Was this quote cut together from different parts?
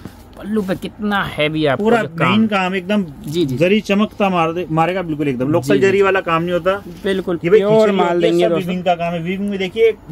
no; 0 cuts

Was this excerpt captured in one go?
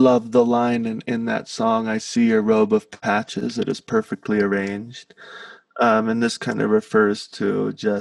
no; 1 cut; at 1.0 s

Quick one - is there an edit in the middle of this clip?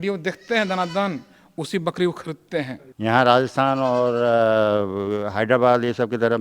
yes; 1 cut; at 2.8 s

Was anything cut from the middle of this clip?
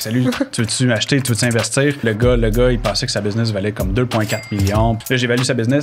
yes; 2 cuts; at 2.0 s, 5.0 s

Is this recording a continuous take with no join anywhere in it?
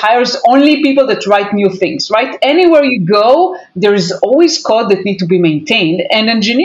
no; 2 cuts; at 2.3 s, 4.1 s

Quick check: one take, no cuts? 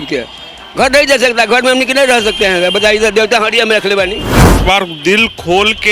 no; 1 cut; at 4.6 s

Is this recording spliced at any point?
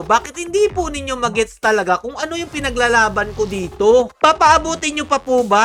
no; 0 cuts

